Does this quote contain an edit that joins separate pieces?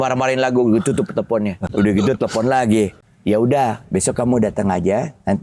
yes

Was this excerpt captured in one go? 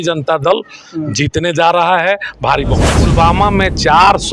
no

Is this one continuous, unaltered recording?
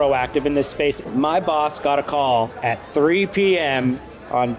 no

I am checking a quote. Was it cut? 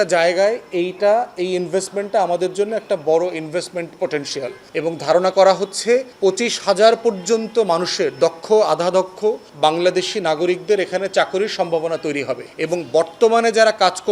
yes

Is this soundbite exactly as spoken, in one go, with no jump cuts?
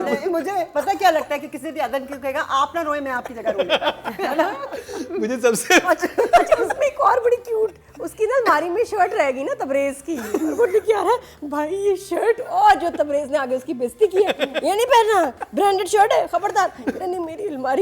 yes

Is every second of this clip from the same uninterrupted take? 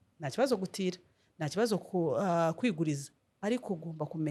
yes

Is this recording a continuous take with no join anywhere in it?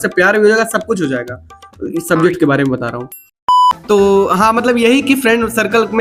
yes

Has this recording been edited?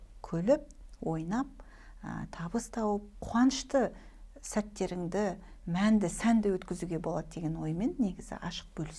yes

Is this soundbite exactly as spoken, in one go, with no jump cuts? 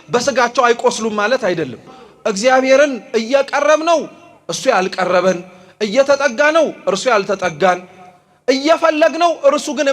no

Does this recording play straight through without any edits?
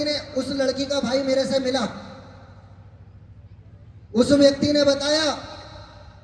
yes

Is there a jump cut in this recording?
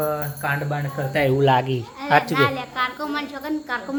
no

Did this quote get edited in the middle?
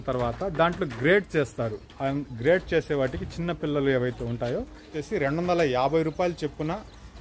yes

